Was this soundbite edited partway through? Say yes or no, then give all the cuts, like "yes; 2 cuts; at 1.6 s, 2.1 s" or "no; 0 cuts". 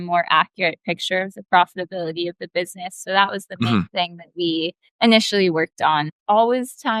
yes; 2 cuts; at 4.8 s, 6.1 s